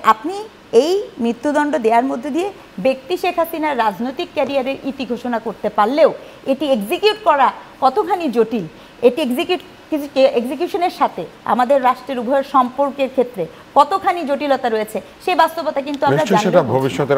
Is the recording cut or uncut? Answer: uncut